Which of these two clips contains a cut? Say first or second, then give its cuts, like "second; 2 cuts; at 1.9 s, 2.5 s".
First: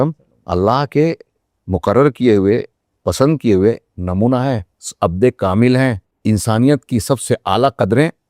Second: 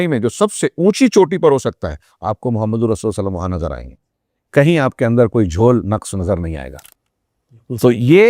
first; 1 cut; at 6.1 s